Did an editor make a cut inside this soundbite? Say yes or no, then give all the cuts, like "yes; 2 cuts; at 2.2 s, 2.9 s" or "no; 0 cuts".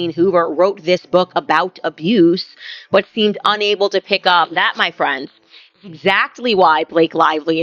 yes; 1 cut; at 4.5 s